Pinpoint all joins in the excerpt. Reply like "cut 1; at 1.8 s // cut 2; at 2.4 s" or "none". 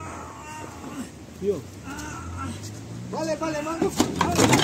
none